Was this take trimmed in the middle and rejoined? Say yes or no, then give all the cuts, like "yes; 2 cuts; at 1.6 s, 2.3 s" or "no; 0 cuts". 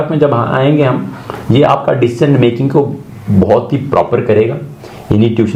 no; 0 cuts